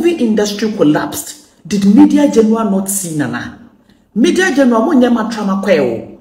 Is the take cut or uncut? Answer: uncut